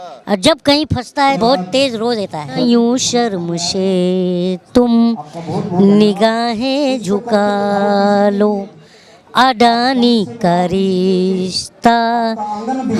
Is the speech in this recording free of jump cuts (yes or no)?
no